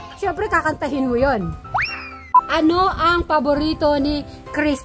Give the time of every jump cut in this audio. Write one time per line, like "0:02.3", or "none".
0:02.0